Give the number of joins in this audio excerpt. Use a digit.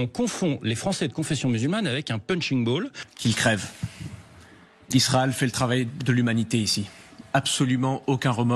1